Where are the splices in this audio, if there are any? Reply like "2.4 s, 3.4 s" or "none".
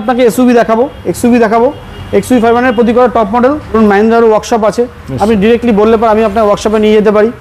3.8 s